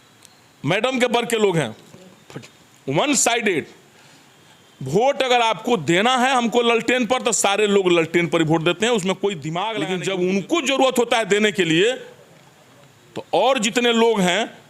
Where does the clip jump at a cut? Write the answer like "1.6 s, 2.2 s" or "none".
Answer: 9.7 s